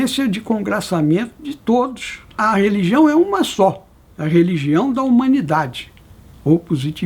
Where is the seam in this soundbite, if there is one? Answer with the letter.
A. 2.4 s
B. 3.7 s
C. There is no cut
A